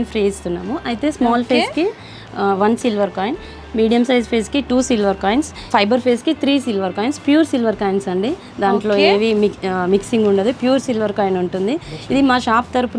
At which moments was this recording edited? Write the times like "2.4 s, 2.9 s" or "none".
none